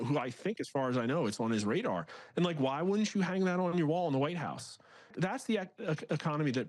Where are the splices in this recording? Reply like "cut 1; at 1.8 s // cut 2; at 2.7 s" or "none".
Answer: cut 1; at 5.1 s